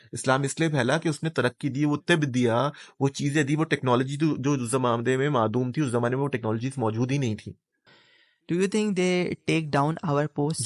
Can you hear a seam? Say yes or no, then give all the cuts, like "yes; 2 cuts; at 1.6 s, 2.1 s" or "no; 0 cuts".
yes; 1 cut; at 7.9 s